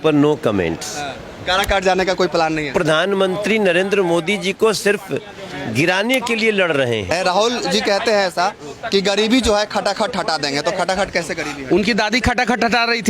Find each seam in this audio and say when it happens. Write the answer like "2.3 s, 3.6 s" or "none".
2.7 s, 7.1 s

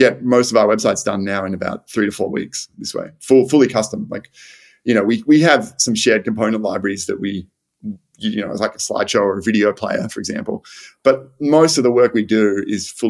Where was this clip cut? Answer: none

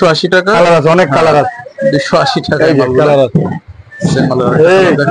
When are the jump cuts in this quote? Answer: none

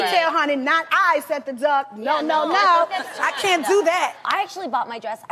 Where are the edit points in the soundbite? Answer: 1.6 s

